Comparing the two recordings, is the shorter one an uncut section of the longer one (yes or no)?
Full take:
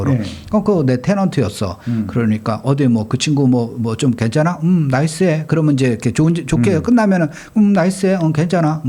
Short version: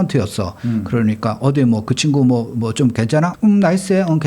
no